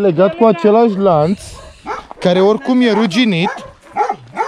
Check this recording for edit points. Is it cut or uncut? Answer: uncut